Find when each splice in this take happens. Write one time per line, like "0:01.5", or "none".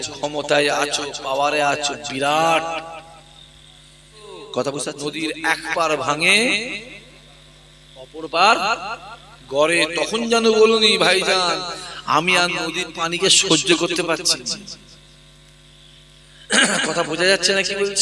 0:05.0